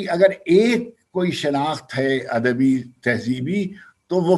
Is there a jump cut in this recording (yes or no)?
no